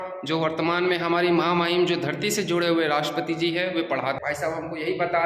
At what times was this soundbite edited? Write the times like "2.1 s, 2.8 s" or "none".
4.2 s